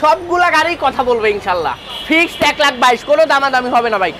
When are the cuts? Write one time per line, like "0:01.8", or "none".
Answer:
0:01.9